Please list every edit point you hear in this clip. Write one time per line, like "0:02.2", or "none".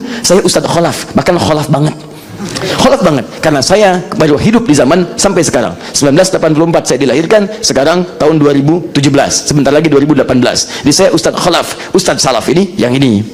none